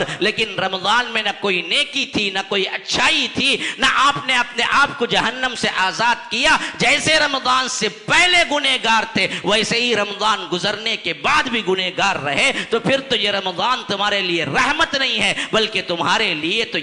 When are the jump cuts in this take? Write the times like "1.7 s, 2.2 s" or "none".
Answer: none